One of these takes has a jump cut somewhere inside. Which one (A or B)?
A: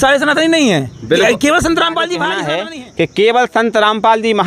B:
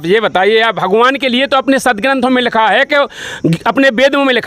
A